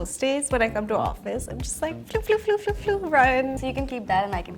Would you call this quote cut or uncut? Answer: cut